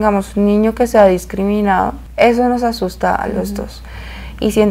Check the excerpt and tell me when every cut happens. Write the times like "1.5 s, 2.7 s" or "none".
none